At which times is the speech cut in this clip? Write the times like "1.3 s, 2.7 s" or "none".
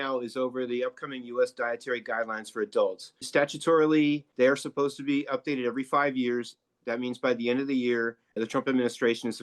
3.2 s, 4.3 s, 8.2 s

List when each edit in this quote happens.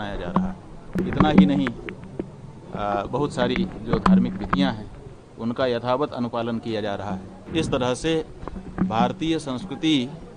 1.0 s, 7.4 s

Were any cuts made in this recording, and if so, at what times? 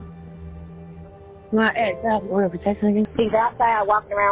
3.1 s

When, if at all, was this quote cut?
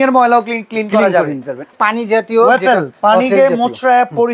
1.7 s

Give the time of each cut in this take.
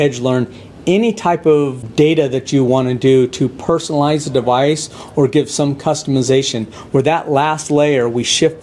1.8 s

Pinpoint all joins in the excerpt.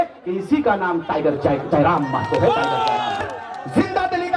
3.2 s

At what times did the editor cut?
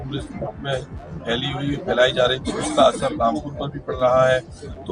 none

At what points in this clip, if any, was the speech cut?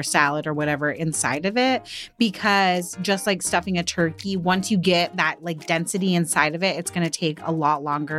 none

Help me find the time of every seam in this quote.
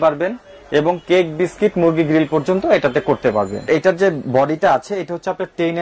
3.7 s

